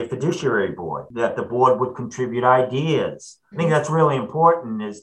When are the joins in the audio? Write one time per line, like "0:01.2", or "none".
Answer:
0:01.0
0:03.4

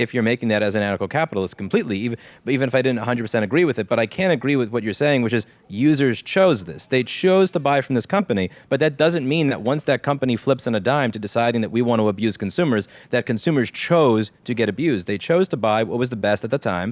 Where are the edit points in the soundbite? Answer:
none

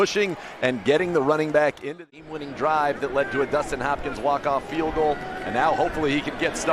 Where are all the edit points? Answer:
0:02.0

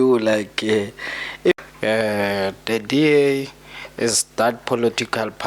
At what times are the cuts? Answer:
0:01.6

